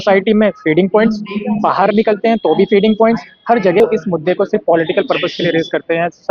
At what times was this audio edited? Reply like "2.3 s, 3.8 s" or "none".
3.8 s